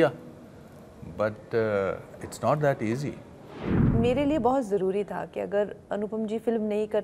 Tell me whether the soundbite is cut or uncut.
cut